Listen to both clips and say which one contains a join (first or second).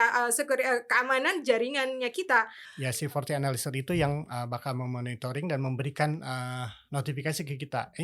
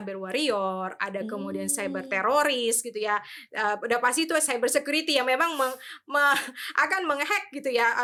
first